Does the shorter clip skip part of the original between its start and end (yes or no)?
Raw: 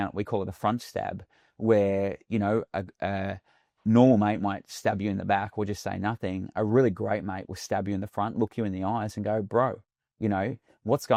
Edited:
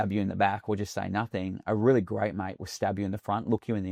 no